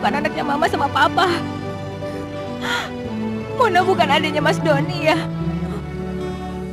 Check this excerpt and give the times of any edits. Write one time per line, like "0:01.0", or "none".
none